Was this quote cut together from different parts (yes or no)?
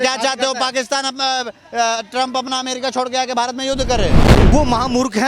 yes